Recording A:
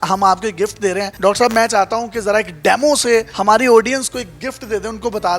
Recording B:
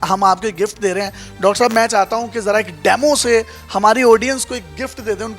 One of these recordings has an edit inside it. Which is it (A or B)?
A